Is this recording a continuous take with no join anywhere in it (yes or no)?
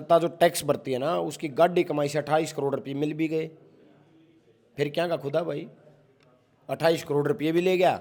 yes